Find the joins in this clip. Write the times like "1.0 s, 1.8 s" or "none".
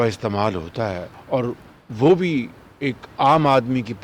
1.1 s